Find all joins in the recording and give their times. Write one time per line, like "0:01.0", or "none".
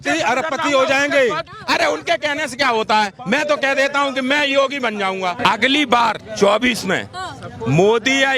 0:01.5
0:05.4